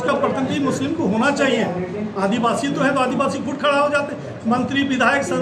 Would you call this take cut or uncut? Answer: uncut